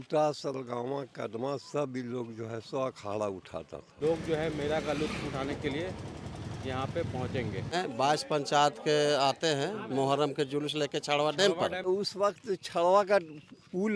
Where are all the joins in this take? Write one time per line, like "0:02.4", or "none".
0:03.8
0:07.7
0:11.9